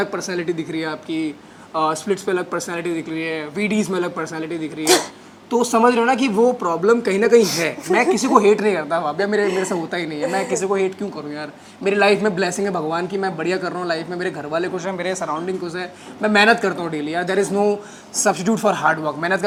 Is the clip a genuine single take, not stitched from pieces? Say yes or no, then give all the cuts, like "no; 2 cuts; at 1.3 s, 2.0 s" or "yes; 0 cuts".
yes; 0 cuts